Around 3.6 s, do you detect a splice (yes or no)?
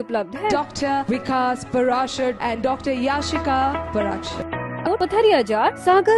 no